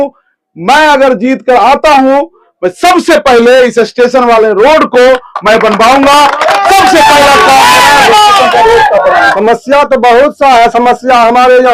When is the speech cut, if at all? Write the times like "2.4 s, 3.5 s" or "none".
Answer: 9.3 s